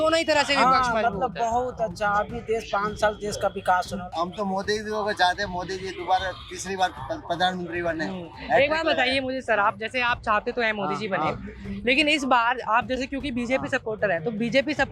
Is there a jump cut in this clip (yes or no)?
yes